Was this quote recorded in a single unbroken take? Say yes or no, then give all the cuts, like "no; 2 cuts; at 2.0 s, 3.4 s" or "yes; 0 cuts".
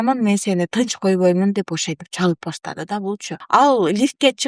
no; 1 cut; at 3.3 s